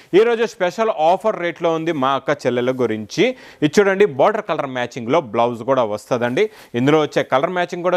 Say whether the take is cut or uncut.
uncut